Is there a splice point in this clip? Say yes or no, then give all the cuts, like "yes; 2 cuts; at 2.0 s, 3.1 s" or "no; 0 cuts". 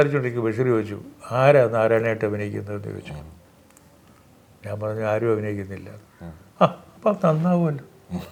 no; 0 cuts